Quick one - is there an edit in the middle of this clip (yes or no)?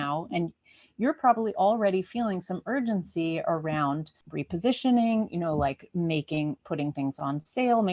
yes